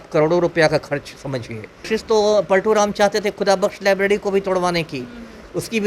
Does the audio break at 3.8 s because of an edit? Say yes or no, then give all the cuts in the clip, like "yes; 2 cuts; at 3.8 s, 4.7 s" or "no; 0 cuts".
no; 1 cut; at 1.9 s